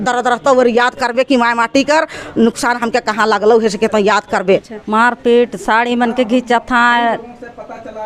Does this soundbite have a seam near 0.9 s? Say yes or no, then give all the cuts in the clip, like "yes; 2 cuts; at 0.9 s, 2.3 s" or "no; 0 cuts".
no; 1 cut; at 4.8 s